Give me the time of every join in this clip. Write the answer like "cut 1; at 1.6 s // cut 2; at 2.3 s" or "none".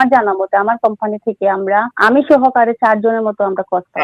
cut 1; at 1.9 s

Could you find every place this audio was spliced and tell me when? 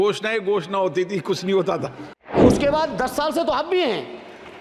cut 1; at 2.4 s

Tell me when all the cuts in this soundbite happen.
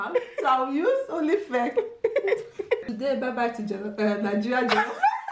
cut 1; at 2.8 s

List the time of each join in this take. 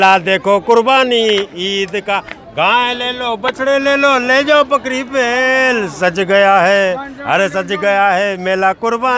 none

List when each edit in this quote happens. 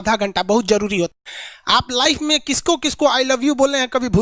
cut 1; at 1.1 s

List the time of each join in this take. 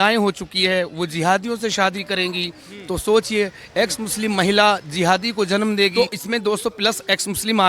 cut 1; at 5.9 s

